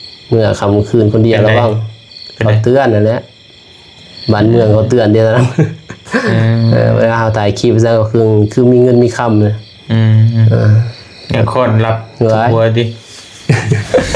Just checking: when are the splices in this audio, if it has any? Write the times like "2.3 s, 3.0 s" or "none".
none